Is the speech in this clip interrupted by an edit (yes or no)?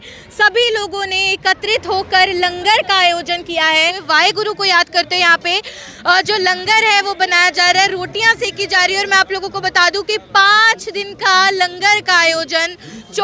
yes